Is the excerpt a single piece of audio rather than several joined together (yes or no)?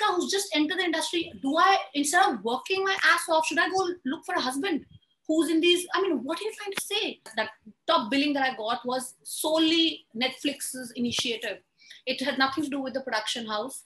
no